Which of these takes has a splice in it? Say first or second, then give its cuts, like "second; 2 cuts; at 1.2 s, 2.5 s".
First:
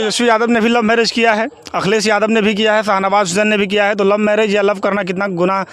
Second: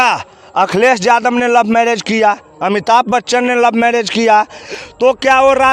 second; 1 cut; at 4.6 s